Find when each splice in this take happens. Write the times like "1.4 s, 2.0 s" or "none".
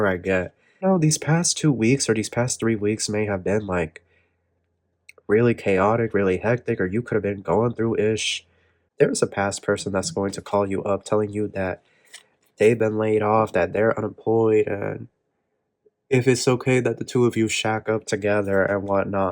0.8 s, 8.8 s